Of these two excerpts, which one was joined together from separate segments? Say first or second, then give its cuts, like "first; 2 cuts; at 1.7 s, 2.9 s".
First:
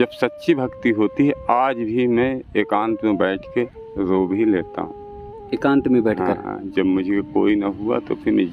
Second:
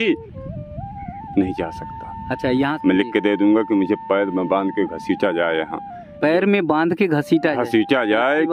second; 1 cut; at 2.7 s